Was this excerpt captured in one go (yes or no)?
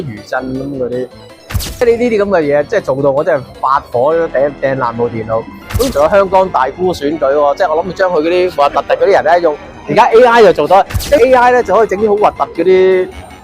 no